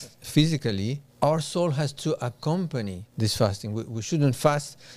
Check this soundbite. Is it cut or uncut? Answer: cut